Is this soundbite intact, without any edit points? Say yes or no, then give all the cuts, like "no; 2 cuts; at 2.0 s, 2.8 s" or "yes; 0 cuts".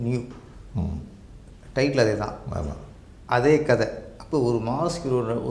yes; 0 cuts